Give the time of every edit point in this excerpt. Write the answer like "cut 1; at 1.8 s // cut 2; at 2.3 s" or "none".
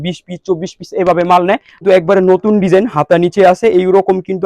cut 1; at 1.8 s